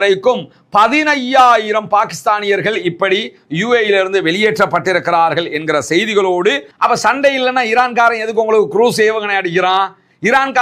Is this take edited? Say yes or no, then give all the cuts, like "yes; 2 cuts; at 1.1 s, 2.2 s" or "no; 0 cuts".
yes; 1 cut; at 6.7 s